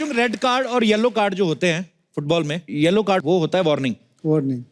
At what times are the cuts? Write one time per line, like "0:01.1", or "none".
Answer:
0:03.0